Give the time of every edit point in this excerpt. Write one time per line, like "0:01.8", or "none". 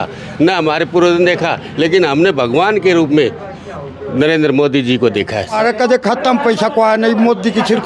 0:05.6